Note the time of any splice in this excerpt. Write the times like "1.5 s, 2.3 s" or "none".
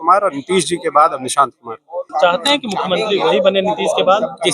2.0 s